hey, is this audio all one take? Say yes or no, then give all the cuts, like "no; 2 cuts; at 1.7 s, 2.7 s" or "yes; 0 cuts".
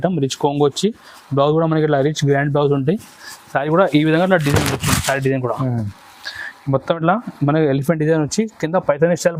yes; 0 cuts